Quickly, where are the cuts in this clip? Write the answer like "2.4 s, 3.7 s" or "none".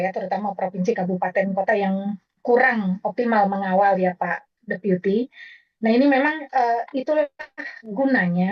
none